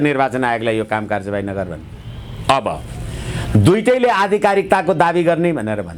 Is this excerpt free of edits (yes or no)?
yes